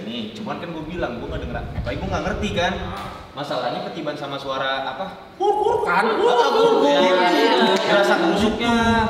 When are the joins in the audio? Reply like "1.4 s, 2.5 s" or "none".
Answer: none